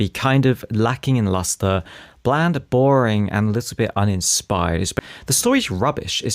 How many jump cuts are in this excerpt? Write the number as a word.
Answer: one